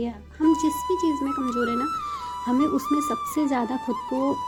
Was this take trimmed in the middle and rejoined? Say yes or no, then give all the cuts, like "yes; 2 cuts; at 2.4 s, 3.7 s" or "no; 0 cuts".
no; 0 cuts